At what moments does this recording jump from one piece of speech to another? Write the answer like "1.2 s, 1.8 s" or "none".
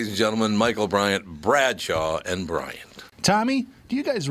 3.0 s